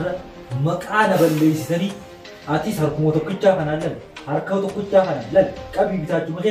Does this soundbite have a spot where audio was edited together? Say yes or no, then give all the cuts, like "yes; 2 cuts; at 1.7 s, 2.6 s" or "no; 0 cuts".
no; 0 cuts